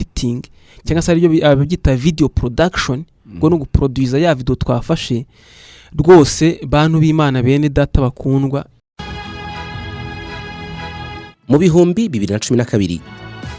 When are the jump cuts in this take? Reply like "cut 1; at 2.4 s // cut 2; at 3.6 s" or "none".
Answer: cut 1; at 8.8 s